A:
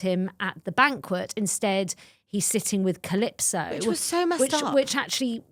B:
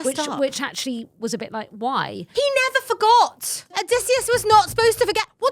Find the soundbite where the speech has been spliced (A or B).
B